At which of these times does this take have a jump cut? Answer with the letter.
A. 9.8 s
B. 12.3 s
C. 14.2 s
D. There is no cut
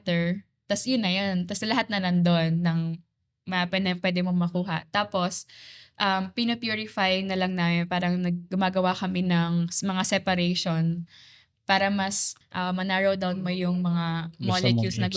B